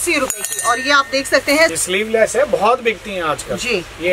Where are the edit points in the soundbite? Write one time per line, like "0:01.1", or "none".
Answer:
0:01.7